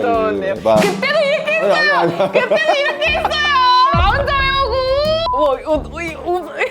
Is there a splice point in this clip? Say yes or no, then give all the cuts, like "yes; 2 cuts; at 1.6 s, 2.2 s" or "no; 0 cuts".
yes; 2 cuts; at 3.9 s, 5.3 s